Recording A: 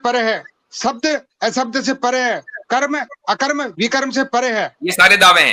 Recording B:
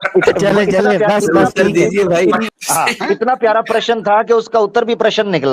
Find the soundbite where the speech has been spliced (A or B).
B